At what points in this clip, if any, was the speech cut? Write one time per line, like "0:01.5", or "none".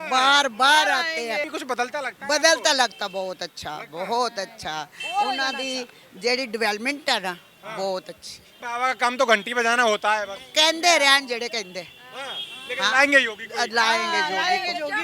0:01.5
0:08.6